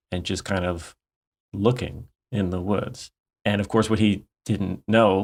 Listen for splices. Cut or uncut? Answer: uncut